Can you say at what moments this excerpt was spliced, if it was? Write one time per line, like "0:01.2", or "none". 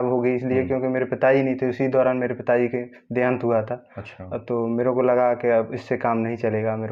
none

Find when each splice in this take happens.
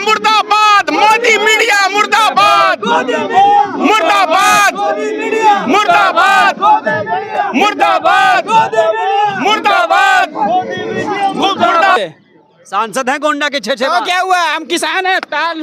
0:12.0

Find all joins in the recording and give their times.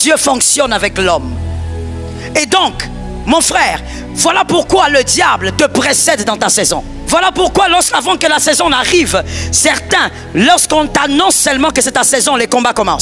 0:06.9

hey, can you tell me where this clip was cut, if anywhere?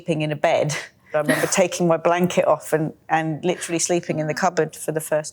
0:01.1

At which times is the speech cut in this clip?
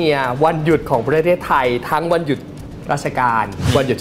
none

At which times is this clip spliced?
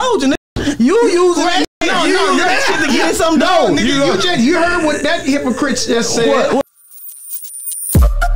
0:06.6

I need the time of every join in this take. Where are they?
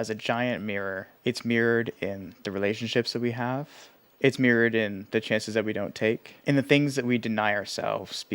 0:01.1
0:06.3

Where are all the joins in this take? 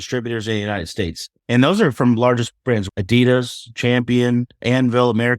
0:01.3
0:02.8
0:04.5

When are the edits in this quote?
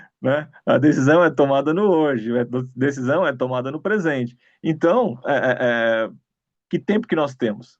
0:04.5

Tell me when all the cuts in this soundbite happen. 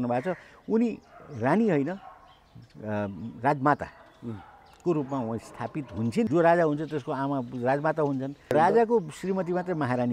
0:06.3
0:08.5

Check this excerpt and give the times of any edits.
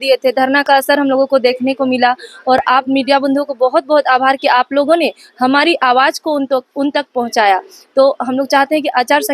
none

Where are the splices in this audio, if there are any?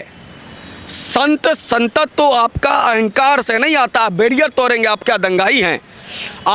none

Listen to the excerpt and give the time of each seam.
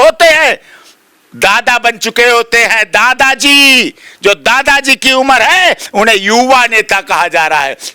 none

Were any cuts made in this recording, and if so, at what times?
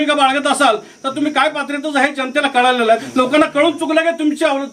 0:03.1

